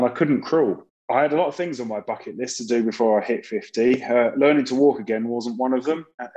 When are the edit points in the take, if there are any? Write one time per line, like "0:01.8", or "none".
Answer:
0:00.9